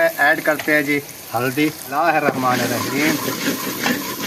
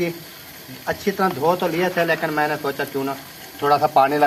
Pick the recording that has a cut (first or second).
first